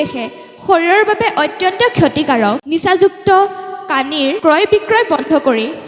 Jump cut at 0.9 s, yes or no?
no